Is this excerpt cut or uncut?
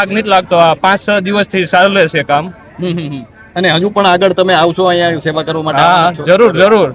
uncut